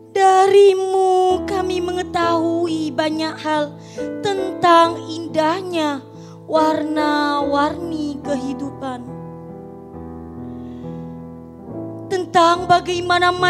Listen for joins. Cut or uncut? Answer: uncut